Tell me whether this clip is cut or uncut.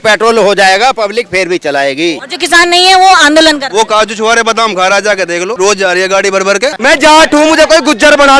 cut